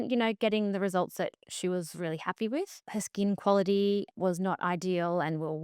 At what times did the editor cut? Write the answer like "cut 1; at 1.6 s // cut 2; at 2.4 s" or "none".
cut 1; at 2.8 s // cut 2; at 4.1 s